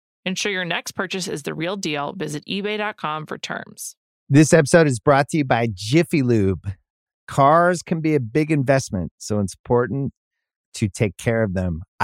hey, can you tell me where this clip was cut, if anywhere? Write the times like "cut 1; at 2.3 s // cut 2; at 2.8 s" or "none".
cut 1; at 4.0 s